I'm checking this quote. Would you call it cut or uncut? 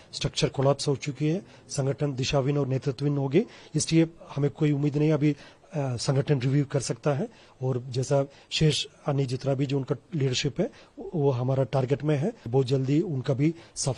cut